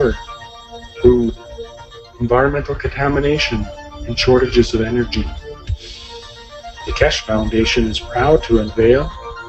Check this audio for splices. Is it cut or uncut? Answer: uncut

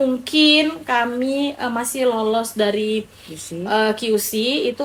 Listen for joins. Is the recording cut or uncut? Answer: uncut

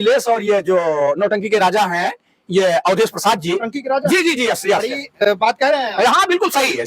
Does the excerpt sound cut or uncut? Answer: uncut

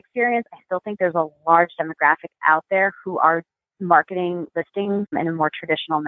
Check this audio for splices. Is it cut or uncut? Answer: cut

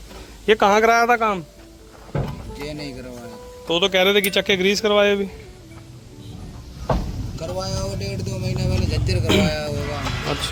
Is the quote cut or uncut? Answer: uncut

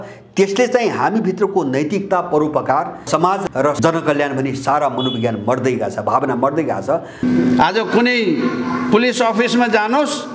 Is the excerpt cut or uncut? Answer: cut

